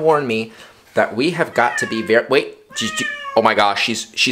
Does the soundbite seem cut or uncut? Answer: uncut